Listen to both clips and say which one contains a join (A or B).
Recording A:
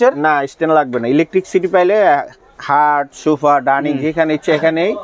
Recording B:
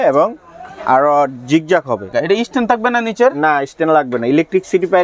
B